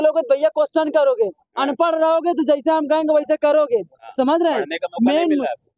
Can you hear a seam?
no; 0 cuts

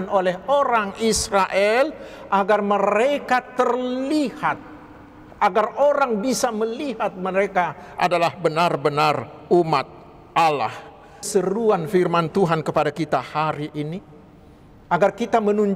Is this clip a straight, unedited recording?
no; 1 cut; at 11.3 s

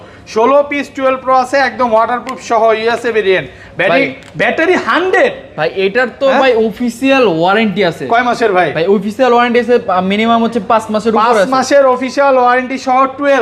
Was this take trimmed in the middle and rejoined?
no; 0 cuts

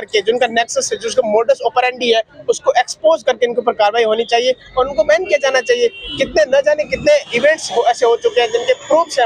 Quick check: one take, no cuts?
yes; 0 cuts

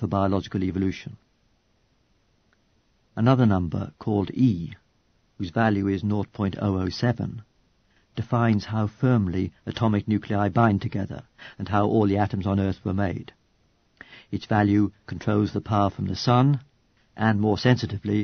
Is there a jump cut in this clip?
no; 0 cuts

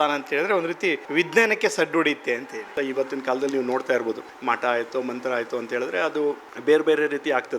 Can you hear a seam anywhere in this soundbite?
yes; 4 cuts; at 1.0 s, 2.7 s, 4.3 s, 6.5 s

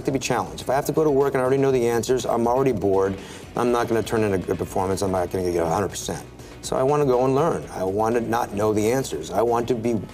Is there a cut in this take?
no; 0 cuts

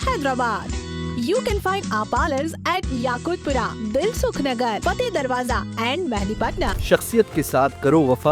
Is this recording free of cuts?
no; 2 cuts; at 1.1 s, 6.8 s

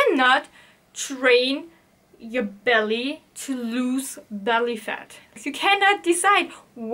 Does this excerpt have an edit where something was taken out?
yes; 1 cut; at 5.4 s

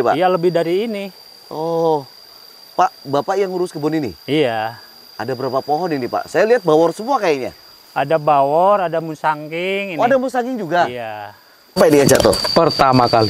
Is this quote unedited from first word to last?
no; 1 cut; at 11.8 s

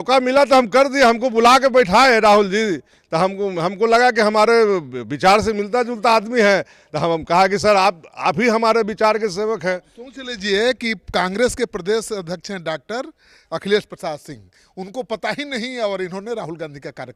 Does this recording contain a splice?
no; 0 cuts

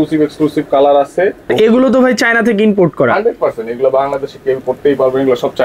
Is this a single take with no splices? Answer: no; 1 cut; at 1.4 s

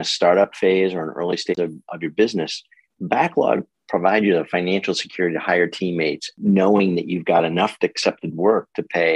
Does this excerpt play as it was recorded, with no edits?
no; 2 cuts; at 1.5 s, 6.4 s

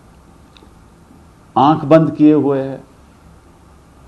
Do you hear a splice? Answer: no; 0 cuts

